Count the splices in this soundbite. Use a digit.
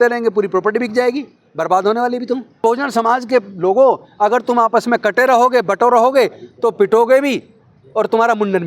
1